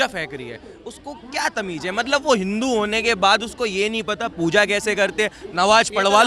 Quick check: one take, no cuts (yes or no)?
yes